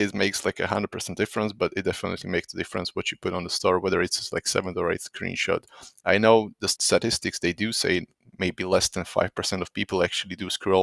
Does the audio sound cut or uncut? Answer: cut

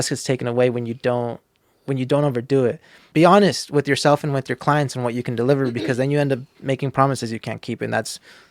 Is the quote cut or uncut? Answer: cut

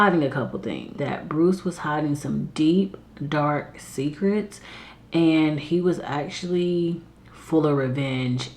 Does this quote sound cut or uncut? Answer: cut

